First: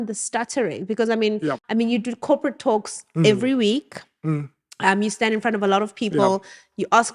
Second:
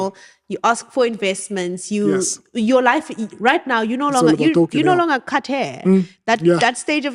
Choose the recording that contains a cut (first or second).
first